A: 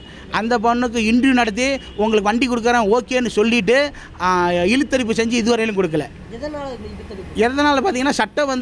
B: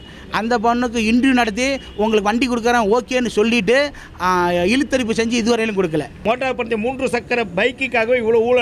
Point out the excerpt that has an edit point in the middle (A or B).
B